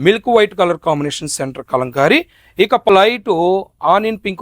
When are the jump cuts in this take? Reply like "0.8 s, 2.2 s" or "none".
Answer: 2.9 s